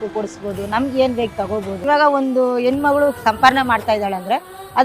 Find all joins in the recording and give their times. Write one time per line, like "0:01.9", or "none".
0:01.7